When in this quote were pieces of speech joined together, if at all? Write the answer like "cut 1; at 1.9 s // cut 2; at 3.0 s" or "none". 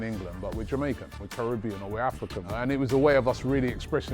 cut 1; at 1.2 s // cut 2; at 2.5 s